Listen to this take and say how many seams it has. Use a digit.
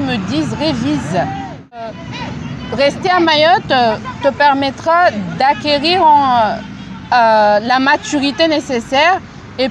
1